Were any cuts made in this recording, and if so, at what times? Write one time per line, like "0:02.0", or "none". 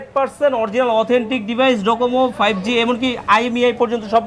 none